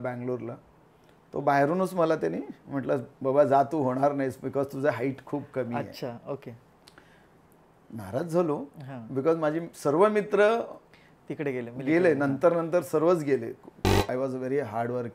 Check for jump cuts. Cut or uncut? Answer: cut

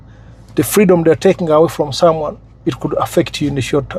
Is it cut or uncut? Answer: uncut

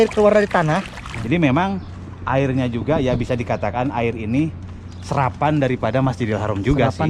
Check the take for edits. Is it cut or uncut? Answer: cut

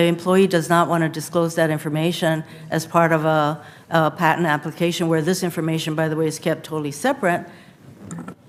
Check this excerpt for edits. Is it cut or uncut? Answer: uncut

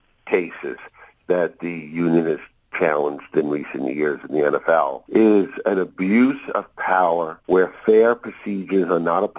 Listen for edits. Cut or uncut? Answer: cut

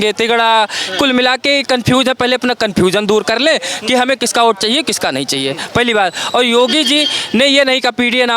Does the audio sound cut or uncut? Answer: uncut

